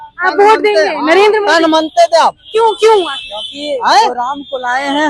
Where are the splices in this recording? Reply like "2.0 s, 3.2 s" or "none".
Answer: none